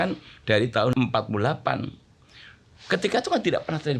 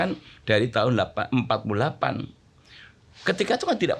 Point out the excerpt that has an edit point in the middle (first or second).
first